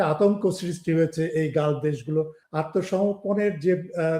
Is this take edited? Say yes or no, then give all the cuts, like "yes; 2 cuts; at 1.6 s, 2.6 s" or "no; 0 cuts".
yes; 1 cut; at 2.4 s